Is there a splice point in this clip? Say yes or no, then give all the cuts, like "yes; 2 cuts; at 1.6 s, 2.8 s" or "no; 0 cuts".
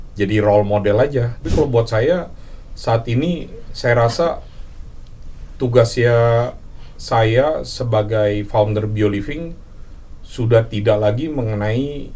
yes; 1 cut; at 1.4 s